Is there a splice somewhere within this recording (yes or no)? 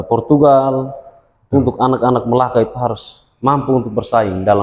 no